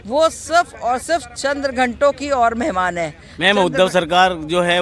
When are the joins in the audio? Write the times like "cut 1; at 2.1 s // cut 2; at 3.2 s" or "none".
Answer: none